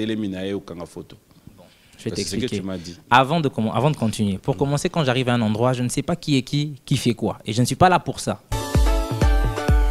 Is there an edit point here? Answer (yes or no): yes